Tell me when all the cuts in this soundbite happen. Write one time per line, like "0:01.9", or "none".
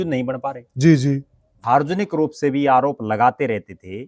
0:01.6